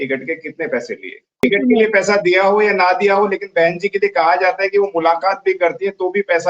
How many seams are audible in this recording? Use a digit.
1